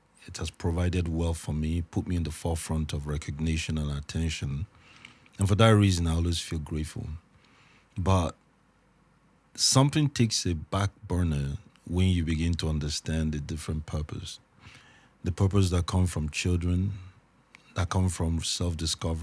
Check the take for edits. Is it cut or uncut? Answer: uncut